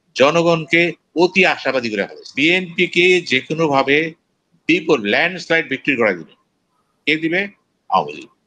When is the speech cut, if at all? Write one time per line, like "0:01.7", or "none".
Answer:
0:02.3

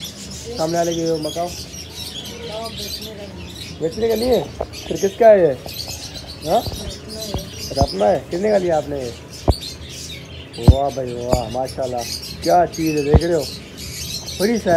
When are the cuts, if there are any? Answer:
none

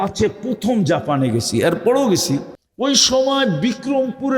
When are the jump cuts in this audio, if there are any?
0:02.6

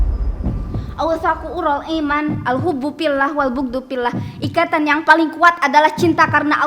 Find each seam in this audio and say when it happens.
0:01.0

